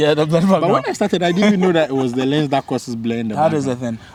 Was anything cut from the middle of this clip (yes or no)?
no